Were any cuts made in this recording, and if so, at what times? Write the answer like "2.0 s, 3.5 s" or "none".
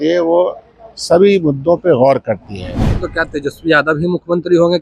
3.0 s